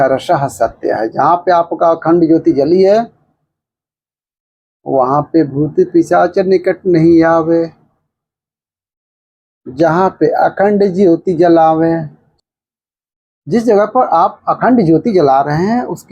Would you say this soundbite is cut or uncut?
cut